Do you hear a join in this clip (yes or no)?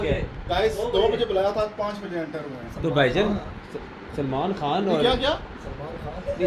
no